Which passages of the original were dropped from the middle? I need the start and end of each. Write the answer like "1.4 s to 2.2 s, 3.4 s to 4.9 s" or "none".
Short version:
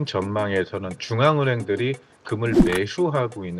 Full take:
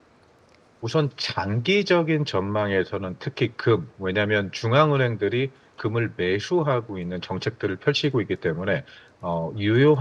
3.2 s to 4.5 s